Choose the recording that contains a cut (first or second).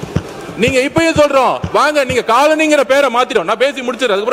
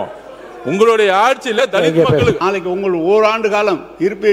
second